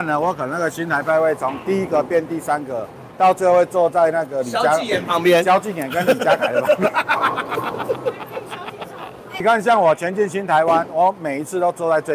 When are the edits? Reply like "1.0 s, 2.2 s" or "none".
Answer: 9.4 s